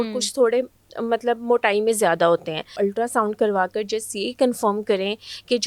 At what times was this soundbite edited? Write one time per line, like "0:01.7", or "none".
0:02.8